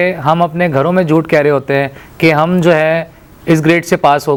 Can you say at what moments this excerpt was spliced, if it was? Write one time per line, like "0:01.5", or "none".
none